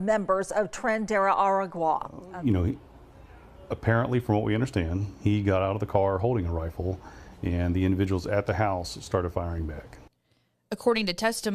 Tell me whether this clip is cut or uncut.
cut